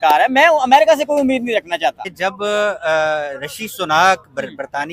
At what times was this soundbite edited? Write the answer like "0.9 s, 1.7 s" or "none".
2.1 s